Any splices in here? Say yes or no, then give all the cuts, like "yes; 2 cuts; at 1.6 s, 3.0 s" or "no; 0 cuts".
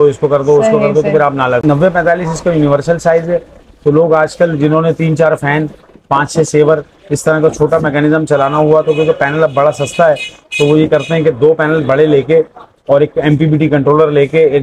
yes; 1 cut; at 1.6 s